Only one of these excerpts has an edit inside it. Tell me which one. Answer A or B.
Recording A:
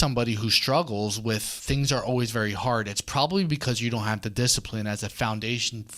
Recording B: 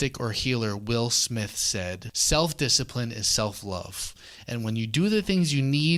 A